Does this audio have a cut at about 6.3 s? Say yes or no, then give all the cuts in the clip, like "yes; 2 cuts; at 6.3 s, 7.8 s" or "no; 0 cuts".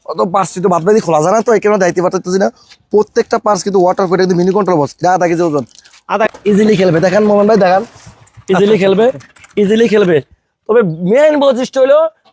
yes; 1 cut; at 6.3 s